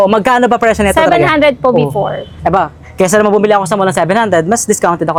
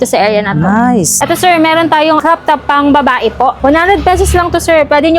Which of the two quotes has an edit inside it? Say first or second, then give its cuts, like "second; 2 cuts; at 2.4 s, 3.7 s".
second; 3 cuts; at 1.1 s, 2.2 s, 3.6 s